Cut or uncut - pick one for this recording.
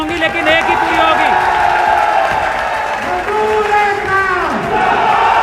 uncut